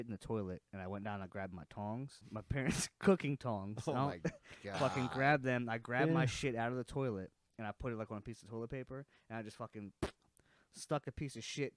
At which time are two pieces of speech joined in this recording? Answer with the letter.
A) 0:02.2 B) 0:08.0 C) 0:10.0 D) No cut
A